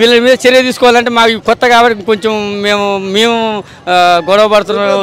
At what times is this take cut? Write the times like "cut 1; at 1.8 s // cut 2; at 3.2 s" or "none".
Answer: none